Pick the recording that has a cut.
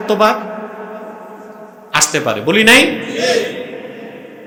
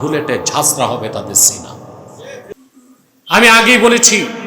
second; 1 cut; at 2.5 s

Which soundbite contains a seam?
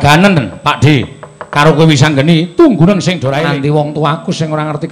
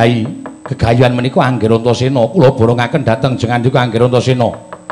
first; 1 cut; at 3.4 s

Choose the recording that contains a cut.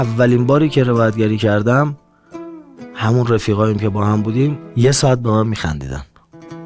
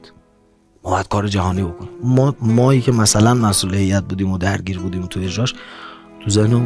first; 1 cut; at 4.6 s

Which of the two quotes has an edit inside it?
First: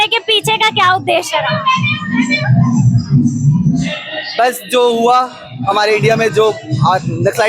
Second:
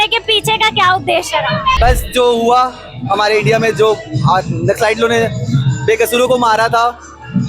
second; 1 cut; at 1.8 s

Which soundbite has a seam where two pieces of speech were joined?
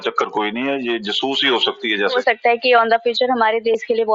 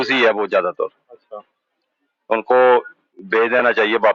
first; 1 cut; at 2.2 s

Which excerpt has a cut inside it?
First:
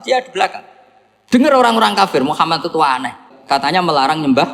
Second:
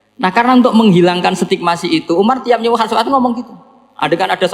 first; 1 cut; at 3.3 s

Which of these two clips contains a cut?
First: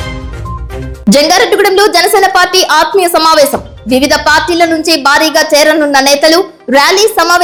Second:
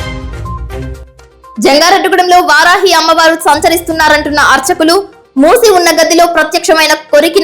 second; 1 cut; at 0.9 s

